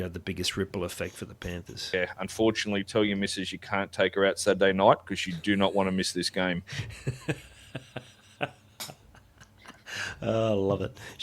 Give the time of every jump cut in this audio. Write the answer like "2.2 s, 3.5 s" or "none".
1.8 s